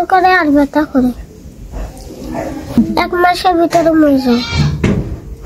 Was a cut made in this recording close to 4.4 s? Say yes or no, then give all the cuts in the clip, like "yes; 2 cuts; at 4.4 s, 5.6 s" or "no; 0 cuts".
no; 0 cuts